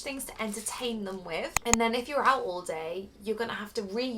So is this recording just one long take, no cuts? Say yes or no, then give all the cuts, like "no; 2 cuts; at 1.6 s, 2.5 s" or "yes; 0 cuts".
no; 1 cut; at 1.5 s